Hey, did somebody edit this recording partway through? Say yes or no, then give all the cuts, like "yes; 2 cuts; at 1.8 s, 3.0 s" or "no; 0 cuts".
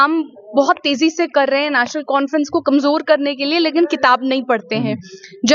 no; 0 cuts